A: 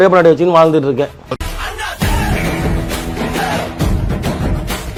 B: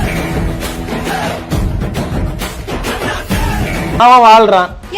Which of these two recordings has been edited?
B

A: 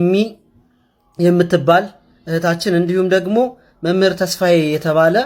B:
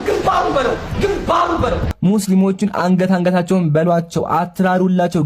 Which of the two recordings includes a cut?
B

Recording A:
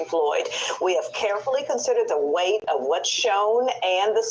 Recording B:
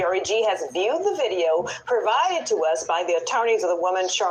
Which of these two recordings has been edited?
A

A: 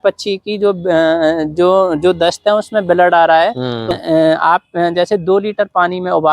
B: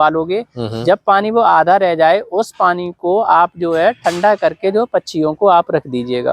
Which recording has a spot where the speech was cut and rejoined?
A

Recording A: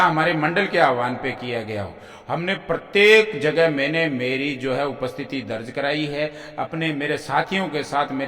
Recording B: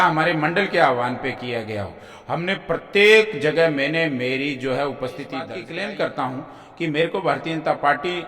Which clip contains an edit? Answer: B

